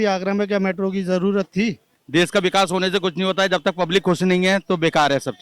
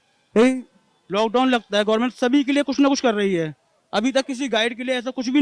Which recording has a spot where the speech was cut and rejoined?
first; 1 cut; at 1.9 s

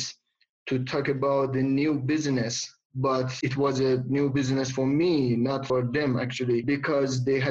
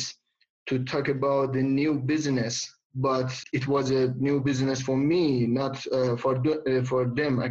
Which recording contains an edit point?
first; 3 cuts; at 3.3 s, 5.6 s, 6.6 s

